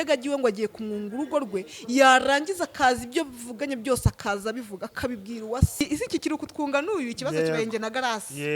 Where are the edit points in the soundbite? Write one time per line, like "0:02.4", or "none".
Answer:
0:05.8